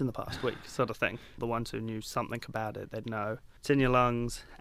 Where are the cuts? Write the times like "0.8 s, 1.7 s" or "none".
1.4 s, 3.5 s